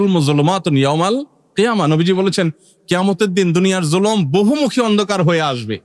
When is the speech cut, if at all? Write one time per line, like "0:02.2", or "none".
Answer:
none